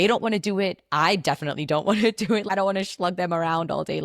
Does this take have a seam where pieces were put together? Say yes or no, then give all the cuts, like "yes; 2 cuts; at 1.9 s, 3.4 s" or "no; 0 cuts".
yes; 1 cut; at 2.5 s